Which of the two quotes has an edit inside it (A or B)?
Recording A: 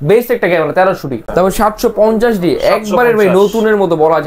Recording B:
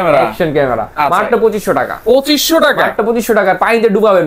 A